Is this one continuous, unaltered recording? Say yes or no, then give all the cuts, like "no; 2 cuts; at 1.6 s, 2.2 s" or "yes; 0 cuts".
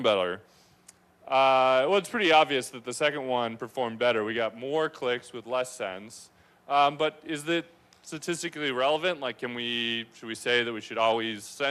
yes; 0 cuts